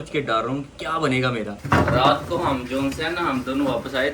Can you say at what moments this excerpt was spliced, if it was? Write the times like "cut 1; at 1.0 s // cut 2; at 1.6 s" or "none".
cut 1; at 1.6 s